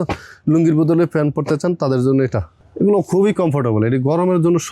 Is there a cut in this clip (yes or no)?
yes